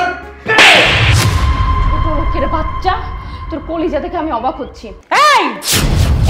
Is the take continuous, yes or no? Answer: no